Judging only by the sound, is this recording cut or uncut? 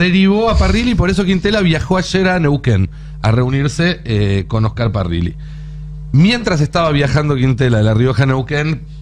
uncut